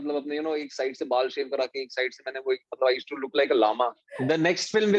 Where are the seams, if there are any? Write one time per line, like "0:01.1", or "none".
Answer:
0:04.1